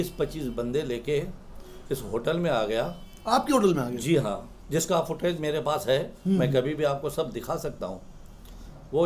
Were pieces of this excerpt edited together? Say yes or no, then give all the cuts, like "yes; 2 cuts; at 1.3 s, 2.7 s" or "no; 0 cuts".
no; 0 cuts